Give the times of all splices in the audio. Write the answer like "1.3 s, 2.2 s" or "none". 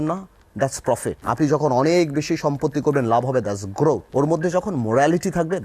1.2 s, 4.0 s